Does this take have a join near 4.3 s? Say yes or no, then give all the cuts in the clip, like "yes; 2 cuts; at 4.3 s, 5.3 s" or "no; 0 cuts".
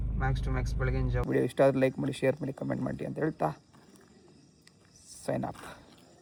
no; 0 cuts